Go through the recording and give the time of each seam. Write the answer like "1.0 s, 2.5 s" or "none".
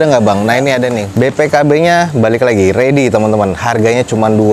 1.0 s